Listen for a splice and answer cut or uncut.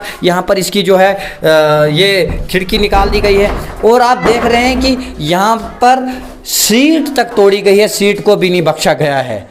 uncut